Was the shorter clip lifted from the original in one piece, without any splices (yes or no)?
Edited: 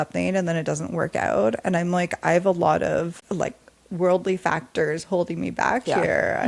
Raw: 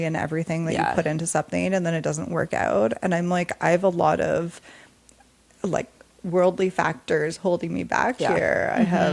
no